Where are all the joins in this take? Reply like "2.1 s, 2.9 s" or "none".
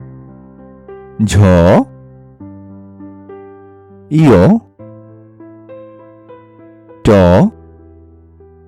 1.1 s, 1.9 s, 3.7 s, 4.8 s, 6.8 s, 7.6 s